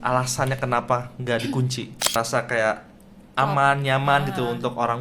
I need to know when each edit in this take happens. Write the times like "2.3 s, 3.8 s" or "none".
2.1 s